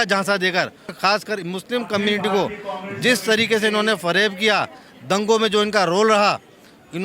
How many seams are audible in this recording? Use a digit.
1